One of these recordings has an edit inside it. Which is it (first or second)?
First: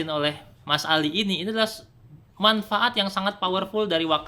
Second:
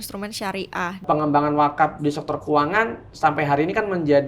second